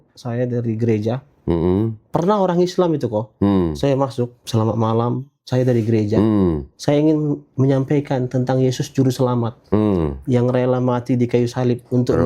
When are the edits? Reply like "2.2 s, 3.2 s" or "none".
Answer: 4.4 s